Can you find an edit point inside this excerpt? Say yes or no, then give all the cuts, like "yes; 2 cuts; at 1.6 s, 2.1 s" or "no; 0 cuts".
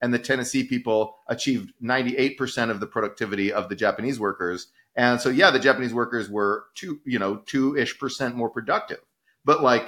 no; 0 cuts